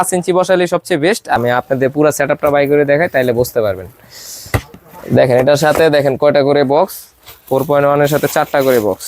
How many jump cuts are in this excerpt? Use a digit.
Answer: 1